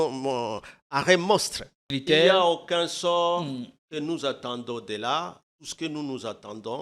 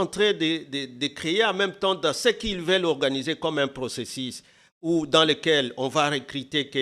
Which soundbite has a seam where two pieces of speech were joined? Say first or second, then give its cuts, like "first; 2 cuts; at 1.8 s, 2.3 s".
first; 1 cut; at 1.8 s